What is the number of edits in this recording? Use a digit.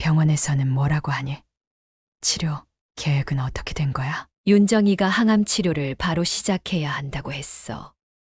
1